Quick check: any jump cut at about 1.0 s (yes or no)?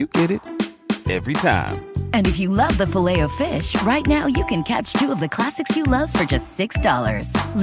no